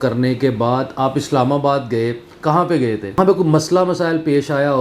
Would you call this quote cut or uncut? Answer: cut